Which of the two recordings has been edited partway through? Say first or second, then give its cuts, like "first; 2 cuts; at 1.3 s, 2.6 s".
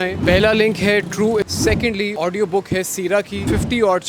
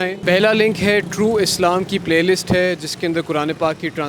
first; 1 cut; at 1.6 s